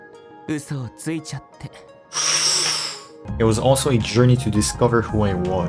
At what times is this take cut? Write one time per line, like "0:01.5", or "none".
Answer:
0:03.2

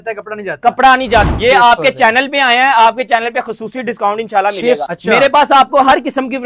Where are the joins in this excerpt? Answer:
0:01.3
0:04.8

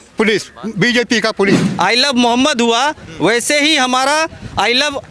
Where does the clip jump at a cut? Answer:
0:01.7

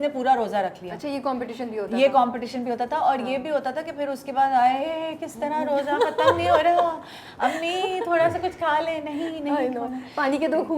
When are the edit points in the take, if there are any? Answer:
none

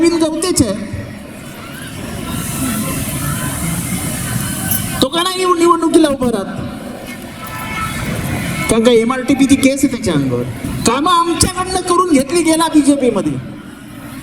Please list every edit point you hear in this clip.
0:10.7

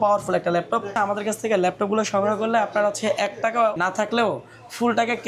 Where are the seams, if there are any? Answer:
0:00.9
0:03.8

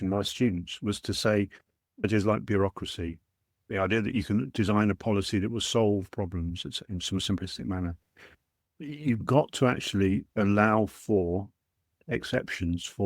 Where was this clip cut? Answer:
0:02.0

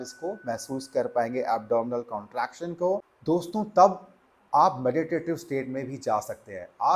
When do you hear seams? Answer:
0:03.1

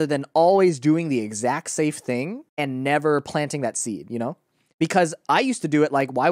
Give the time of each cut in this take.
0:02.4

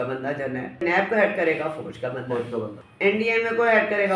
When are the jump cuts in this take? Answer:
0:00.8
0:02.8

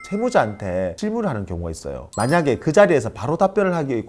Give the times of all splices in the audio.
0:02.0

